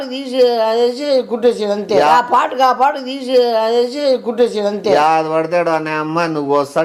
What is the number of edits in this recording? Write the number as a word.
zero